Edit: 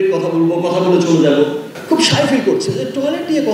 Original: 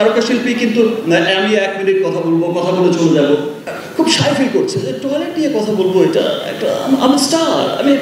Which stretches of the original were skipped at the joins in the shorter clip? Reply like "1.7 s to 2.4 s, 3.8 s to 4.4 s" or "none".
3.6 s to 3.8 s